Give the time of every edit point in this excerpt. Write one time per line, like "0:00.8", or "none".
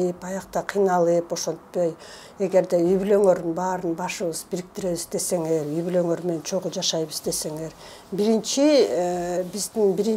none